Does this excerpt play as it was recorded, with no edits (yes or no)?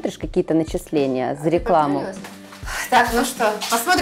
no